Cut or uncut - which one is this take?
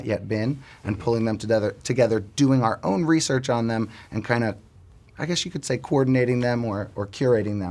uncut